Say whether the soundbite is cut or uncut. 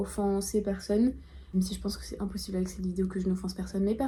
uncut